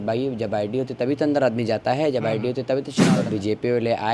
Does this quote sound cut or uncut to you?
cut